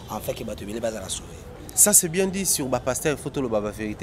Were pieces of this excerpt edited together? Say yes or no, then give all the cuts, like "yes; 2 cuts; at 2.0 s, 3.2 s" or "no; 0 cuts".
no; 0 cuts